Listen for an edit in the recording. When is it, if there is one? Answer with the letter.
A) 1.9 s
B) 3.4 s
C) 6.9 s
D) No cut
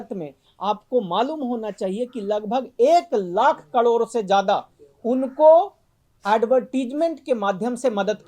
D